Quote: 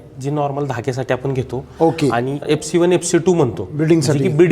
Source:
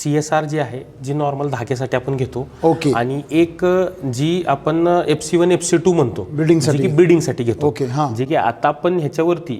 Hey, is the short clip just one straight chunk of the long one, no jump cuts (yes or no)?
no